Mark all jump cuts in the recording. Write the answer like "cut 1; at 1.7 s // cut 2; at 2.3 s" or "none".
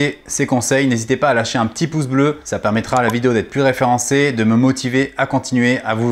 cut 1; at 2.4 s